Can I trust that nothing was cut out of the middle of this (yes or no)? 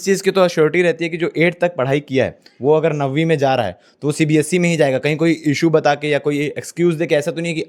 yes